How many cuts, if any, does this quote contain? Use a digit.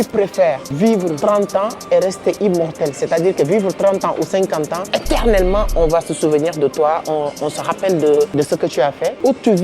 3